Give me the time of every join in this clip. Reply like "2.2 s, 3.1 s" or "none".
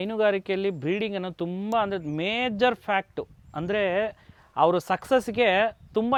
none